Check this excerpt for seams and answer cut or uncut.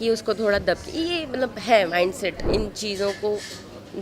cut